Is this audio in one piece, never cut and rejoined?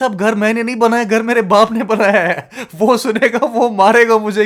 yes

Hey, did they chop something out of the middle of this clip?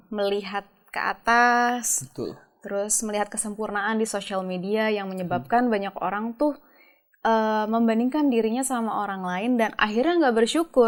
no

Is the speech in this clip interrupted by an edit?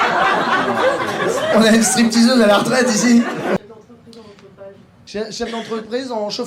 yes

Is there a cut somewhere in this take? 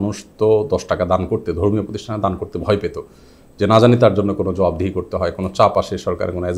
no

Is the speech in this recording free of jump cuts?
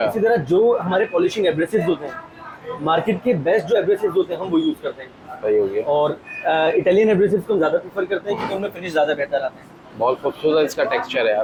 yes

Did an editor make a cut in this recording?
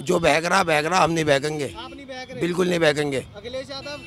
no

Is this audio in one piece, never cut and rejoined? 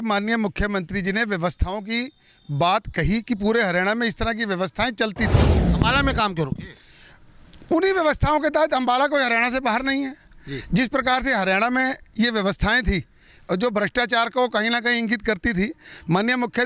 yes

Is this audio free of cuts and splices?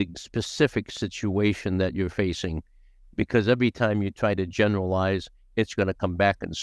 yes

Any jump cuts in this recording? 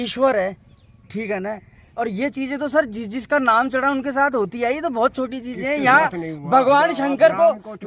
no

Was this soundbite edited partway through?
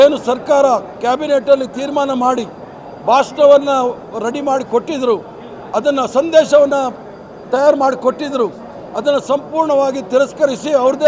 no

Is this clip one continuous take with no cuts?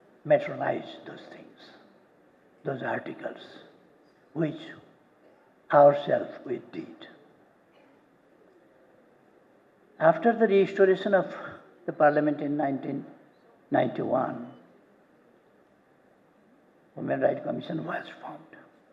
yes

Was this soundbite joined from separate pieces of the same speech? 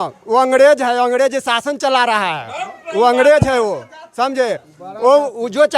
no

